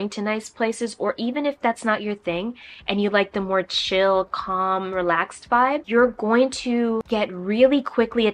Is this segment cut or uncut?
uncut